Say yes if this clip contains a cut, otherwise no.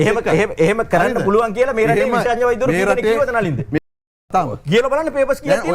yes